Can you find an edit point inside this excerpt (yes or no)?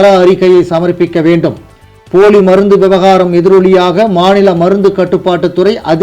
no